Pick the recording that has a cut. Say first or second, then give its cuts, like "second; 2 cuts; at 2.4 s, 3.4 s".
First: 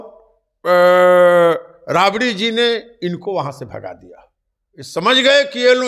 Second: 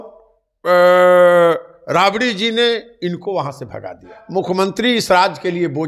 second; 1 cut; at 4.1 s